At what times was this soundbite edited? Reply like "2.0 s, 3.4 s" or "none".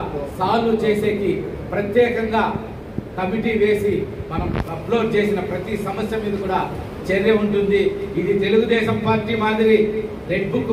none